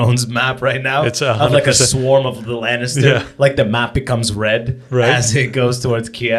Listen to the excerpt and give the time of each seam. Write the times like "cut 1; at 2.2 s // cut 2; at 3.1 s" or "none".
none